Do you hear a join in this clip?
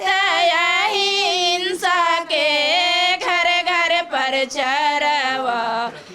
no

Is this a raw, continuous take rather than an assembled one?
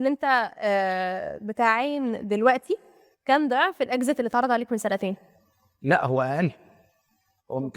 yes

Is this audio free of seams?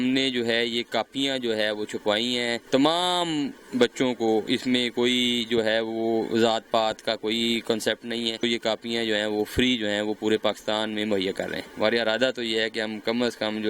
no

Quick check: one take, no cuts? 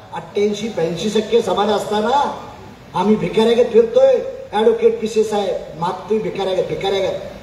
yes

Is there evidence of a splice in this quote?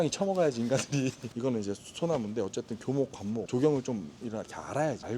yes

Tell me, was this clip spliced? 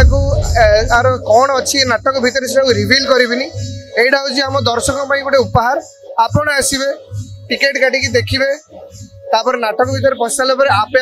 no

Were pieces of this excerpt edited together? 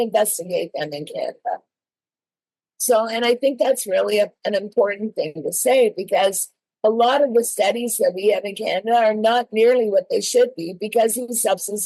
no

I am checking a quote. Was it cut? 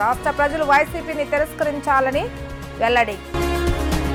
no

